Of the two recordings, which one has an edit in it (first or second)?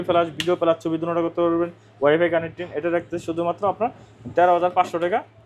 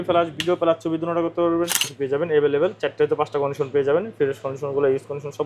second